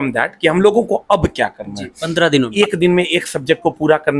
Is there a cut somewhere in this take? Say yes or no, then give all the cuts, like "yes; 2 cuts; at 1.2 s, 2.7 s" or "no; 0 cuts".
yes; 1 cut; at 2.5 s